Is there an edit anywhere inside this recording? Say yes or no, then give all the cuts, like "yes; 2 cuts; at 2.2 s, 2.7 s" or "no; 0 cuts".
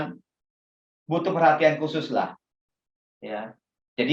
yes; 1 cut; at 2.4 s